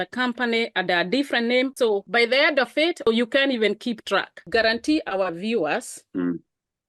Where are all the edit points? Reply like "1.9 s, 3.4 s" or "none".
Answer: 1.7 s, 3.1 s, 4.4 s